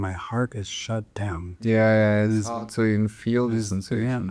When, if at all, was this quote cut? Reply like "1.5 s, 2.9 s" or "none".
none